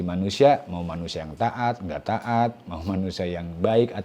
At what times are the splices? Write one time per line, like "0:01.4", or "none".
none